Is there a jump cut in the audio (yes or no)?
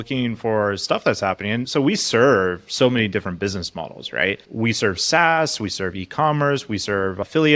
yes